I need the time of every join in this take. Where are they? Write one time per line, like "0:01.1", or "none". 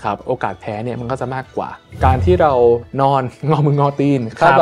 0:01.8
0:02.9